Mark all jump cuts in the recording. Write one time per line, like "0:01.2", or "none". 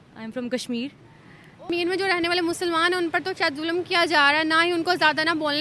0:01.6